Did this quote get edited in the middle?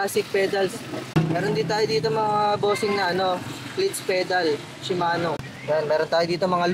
yes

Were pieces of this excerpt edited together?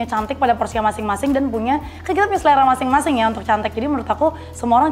no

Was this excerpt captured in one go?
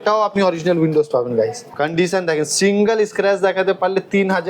no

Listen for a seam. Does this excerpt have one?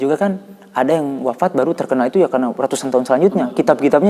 no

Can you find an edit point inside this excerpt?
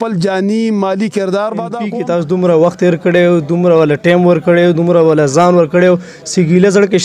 yes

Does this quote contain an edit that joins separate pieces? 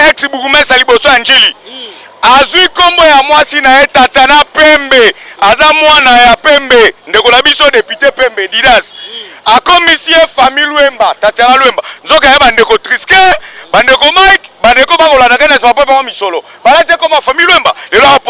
no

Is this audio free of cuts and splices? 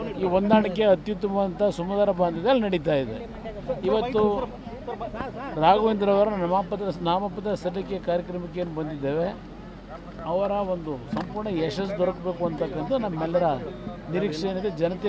no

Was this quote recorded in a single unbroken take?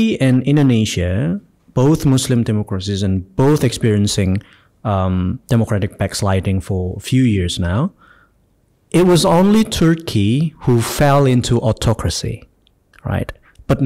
yes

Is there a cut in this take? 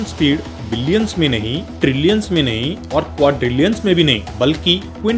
no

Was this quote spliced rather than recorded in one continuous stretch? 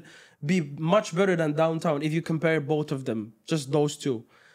no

